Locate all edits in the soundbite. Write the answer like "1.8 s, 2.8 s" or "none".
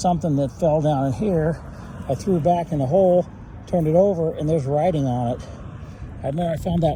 none